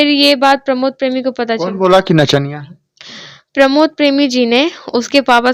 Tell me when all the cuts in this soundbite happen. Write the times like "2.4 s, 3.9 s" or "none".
none